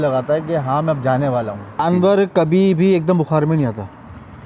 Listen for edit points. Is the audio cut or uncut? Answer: cut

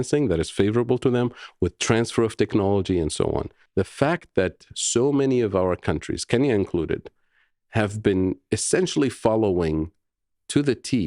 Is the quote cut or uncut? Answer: cut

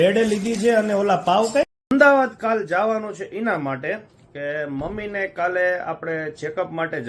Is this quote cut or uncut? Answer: cut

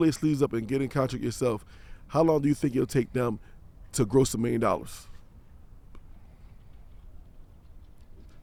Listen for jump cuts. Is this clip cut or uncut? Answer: uncut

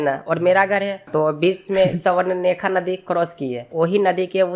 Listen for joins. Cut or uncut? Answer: cut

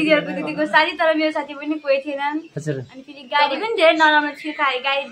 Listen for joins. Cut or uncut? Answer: uncut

